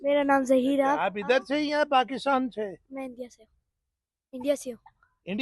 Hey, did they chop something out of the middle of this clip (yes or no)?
yes